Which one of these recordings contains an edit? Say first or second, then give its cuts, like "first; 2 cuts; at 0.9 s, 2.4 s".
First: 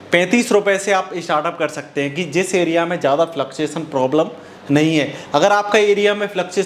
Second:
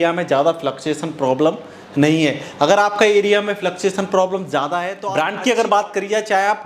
second; 1 cut; at 5.0 s